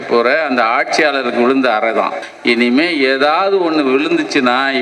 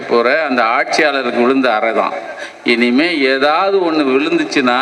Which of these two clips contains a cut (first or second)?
first